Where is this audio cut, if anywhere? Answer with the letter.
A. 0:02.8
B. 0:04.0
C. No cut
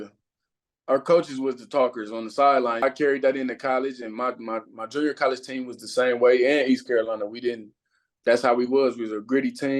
A